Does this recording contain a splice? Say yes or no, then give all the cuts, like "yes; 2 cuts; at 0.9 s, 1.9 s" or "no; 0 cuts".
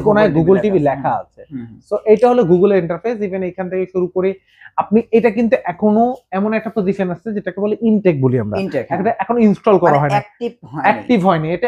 no; 0 cuts